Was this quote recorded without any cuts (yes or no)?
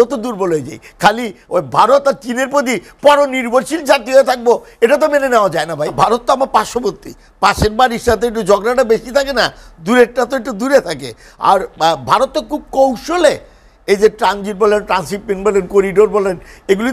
no